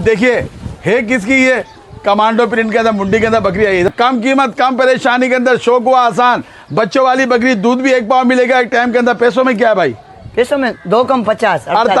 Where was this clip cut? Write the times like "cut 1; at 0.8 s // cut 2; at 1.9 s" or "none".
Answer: cut 1; at 3.9 s